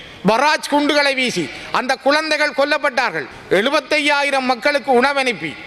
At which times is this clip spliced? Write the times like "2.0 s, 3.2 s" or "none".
3.2 s